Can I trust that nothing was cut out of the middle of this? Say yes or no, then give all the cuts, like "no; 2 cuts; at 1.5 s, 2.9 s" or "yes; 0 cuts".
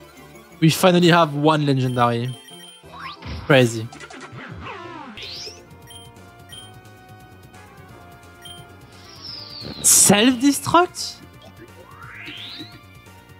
no; 1 cut; at 5.2 s